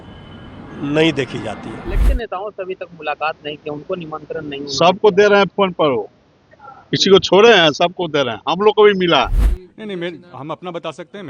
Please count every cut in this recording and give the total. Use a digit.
2